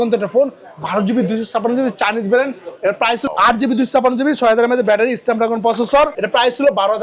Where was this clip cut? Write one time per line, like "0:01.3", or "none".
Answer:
0:03.2
0:06.1